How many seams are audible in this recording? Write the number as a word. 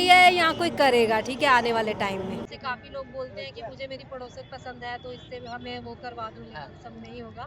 one